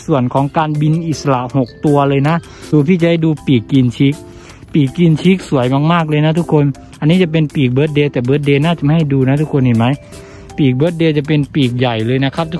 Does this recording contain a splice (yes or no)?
yes